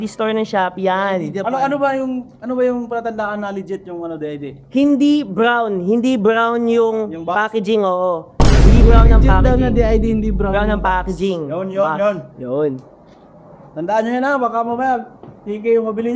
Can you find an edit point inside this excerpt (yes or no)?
no